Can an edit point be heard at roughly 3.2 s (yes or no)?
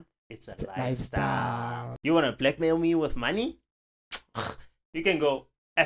no